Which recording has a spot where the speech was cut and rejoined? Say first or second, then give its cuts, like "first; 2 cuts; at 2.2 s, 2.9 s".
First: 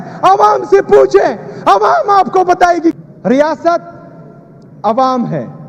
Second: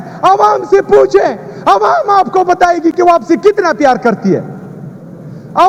first; 1 cut; at 2.9 s